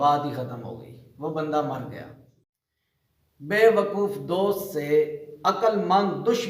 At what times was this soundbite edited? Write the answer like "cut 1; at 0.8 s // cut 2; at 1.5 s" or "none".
cut 1; at 2.3 s